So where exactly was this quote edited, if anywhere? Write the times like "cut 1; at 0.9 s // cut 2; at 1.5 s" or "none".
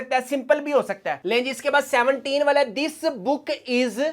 cut 1; at 1.2 s